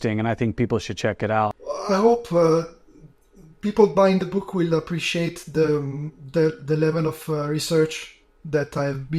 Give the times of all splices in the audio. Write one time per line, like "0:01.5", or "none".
0:01.6